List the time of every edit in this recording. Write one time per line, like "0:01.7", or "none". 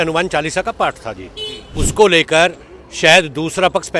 0:01.8